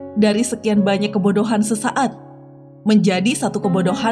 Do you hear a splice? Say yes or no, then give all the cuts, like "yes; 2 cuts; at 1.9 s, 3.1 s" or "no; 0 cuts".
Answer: no; 0 cuts